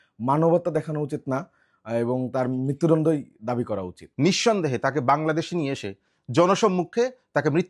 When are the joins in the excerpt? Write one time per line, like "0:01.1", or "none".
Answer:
0:04.0